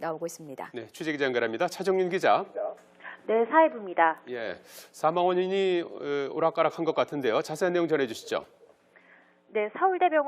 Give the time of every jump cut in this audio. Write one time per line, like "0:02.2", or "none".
none